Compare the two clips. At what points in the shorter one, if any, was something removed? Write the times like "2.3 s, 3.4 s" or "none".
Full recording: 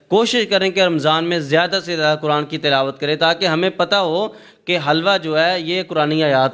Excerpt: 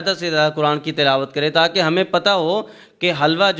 none